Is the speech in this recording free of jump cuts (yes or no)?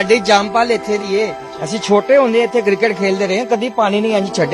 yes